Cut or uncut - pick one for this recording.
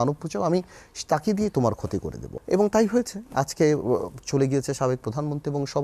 cut